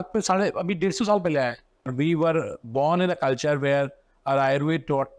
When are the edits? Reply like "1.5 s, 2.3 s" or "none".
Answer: 1.9 s